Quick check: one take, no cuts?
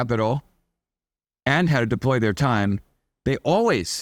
yes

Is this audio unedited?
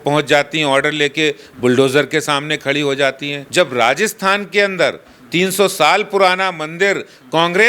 no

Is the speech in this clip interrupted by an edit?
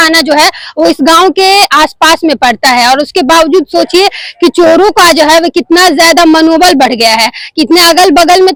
no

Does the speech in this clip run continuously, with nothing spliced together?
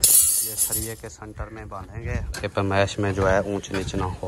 no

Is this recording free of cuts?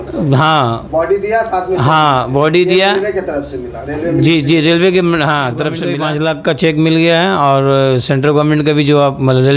no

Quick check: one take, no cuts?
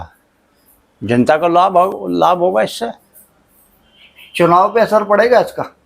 yes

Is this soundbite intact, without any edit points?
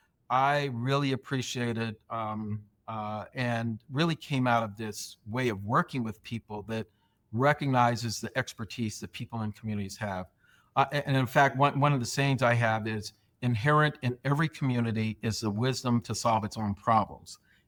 yes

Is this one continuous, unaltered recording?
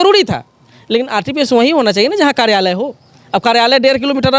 yes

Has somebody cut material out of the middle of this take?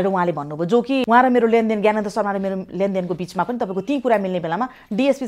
yes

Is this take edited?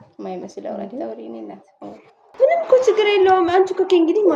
yes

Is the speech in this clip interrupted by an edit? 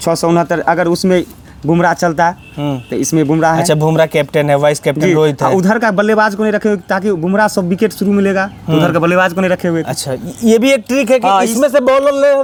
no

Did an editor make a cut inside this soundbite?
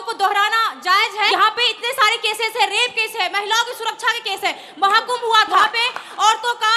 yes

